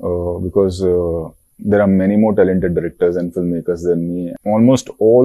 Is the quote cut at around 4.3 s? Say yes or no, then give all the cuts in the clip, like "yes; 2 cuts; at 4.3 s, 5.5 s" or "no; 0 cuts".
yes; 1 cut; at 4.3 s